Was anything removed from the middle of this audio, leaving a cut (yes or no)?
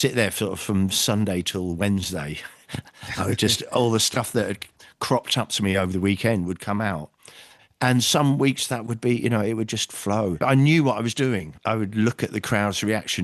yes